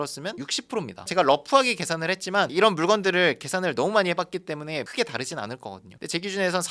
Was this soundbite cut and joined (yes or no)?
no